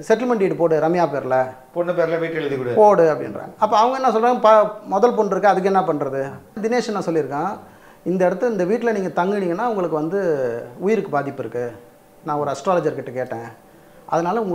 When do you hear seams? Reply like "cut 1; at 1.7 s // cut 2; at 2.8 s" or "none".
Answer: cut 1; at 6.6 s